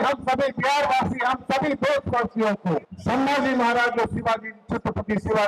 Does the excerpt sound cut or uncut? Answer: cut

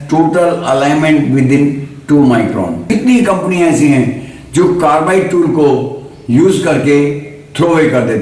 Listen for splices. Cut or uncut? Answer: cut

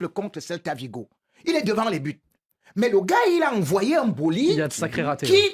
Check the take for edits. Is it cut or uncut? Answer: uncut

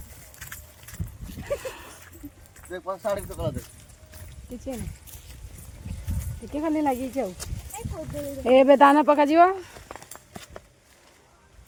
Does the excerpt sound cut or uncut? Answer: uncut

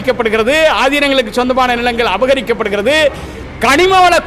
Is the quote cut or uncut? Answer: uncut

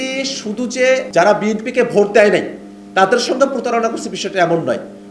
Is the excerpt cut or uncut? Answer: cut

